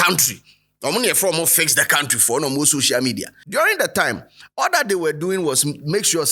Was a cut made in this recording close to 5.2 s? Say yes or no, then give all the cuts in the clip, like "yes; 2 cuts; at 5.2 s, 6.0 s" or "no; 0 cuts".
no; 1 cut; at 3.3 s